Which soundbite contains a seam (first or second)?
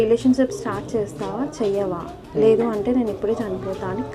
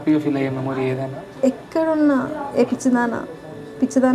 second